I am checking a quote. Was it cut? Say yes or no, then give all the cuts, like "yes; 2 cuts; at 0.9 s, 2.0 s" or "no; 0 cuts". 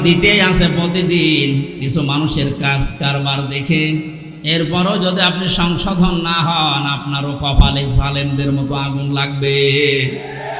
no; 0 cuts